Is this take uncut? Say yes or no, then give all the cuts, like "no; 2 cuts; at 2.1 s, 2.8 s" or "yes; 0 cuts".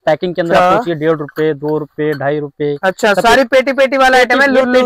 yes; 0 cuts